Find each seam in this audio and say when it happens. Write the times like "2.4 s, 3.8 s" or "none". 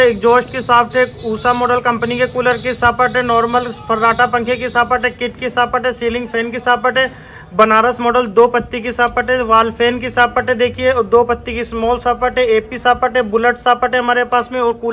none